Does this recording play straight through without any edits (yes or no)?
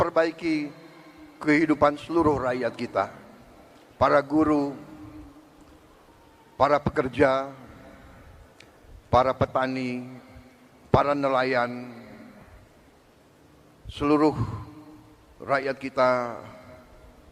yes